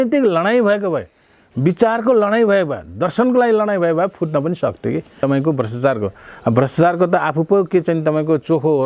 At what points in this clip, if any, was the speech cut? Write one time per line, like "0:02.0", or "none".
0:05.2